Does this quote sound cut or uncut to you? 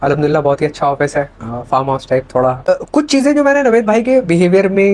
cut